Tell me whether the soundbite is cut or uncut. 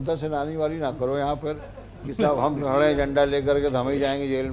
uncut